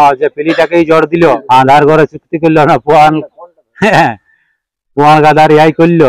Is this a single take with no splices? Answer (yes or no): no